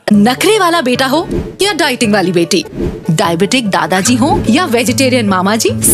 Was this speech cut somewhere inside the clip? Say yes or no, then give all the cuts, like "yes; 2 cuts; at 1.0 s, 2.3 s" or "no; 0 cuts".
no; 0 cuts